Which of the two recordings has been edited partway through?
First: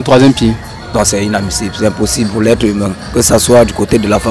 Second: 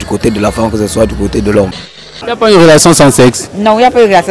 second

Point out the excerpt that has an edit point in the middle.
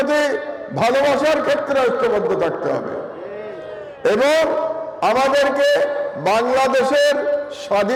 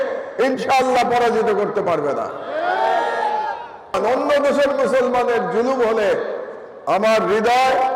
second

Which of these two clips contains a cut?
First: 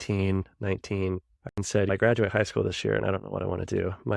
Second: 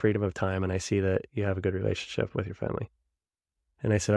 first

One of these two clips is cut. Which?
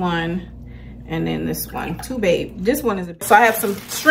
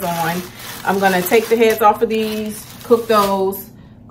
first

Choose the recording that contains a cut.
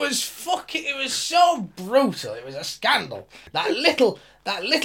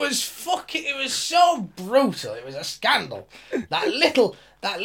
first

